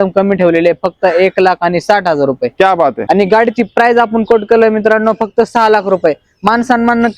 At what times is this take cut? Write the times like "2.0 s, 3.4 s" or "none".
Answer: 3.0 s